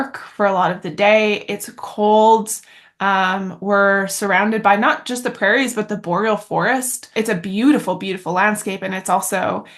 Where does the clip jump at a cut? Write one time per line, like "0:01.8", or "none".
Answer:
0:07.1